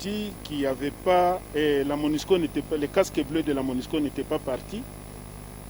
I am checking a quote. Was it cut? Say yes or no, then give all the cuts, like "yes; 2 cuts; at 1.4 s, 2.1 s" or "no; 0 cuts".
no; 0 cuts